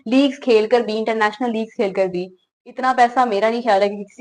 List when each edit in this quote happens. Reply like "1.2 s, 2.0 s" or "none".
none